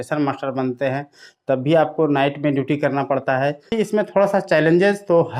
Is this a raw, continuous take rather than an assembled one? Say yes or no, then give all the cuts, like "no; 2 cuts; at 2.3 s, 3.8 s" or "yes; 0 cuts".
no; 1 cut; at 3.7 s